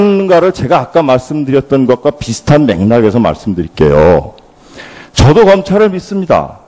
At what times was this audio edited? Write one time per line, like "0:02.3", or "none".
0:01.6